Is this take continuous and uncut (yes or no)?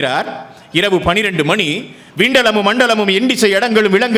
yes